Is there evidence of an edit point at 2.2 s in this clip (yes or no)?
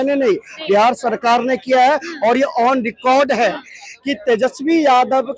no